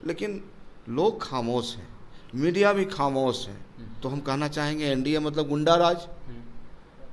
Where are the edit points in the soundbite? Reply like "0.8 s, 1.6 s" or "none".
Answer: 4.0 s